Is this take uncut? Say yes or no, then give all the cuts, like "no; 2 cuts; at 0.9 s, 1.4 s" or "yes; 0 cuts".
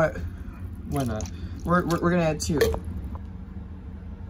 no; 1 cut; at 3.2 s